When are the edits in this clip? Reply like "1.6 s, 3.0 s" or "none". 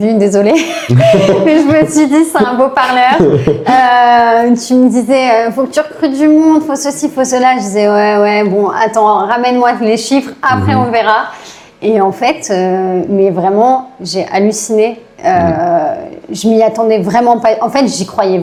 none